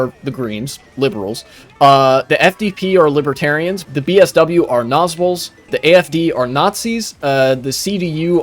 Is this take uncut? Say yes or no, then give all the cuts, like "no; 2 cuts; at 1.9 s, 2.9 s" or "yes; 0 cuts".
no; 2 cuts; at 3.8 s, 5.7 s